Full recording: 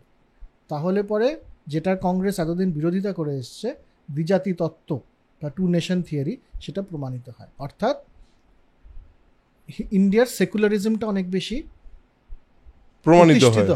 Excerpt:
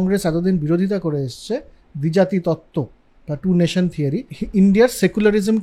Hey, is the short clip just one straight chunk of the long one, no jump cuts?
no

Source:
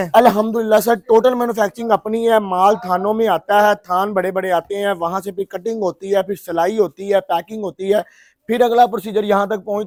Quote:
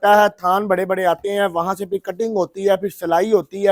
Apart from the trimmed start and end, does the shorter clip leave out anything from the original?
no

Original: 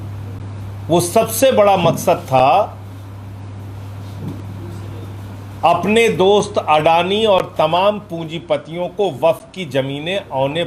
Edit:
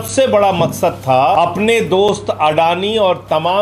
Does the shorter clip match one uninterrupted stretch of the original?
no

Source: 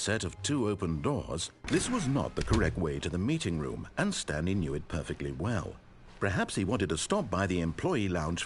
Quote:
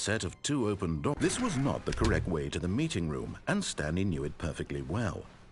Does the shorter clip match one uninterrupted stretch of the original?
no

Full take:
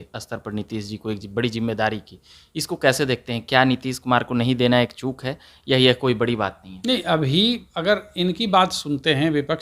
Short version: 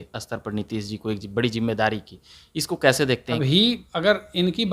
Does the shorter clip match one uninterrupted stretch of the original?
no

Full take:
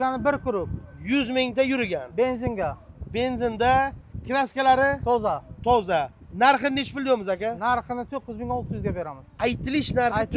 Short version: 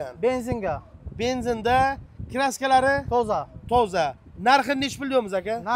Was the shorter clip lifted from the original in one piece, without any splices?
yes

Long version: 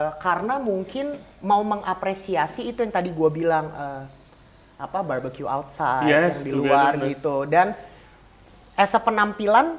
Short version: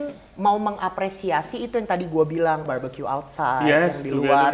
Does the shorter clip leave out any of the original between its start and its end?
yes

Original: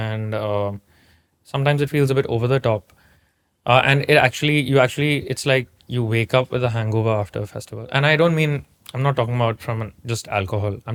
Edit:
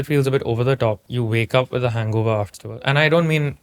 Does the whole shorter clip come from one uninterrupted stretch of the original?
no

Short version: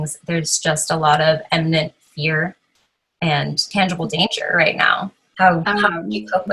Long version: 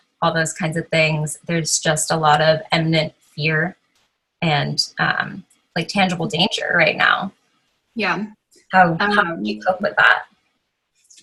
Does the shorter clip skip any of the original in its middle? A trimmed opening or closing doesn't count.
yes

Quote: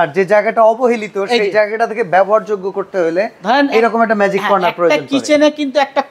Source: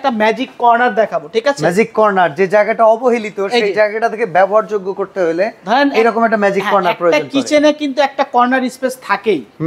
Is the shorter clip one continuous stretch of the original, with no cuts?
yes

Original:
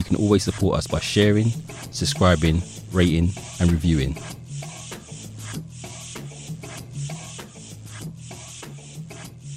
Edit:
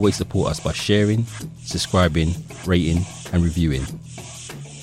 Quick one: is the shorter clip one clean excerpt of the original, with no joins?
no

